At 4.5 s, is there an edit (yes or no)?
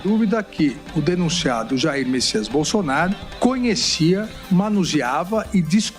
no